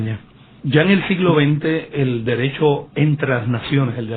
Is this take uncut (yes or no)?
no